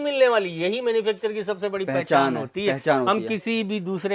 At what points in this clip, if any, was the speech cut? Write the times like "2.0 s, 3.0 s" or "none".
none